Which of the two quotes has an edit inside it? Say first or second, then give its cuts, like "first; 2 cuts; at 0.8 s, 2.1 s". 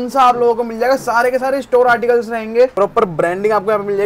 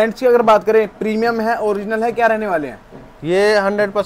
first; 1 cut; at 2.7 s